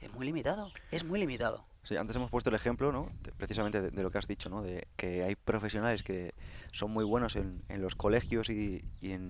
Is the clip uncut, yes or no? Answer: yes